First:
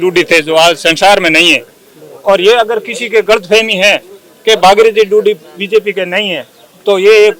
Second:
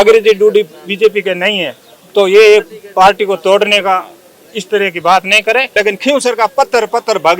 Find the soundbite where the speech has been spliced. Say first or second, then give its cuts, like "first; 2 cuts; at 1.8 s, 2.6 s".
second; 1 cut; at 5.7 s